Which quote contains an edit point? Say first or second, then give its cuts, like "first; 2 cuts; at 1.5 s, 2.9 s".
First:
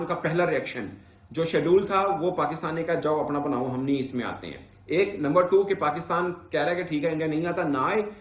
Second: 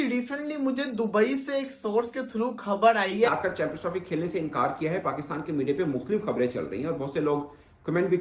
second; 1 cut; at 3.3 s